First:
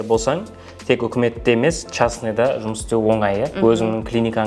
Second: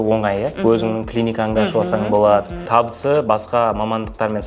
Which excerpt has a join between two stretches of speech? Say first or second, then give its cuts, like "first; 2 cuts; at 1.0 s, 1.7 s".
second; 1 cut; at 2.6 s